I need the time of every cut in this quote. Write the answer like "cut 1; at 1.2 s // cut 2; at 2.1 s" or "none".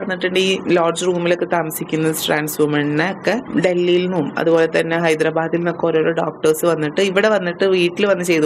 cut 1; at 3.5 s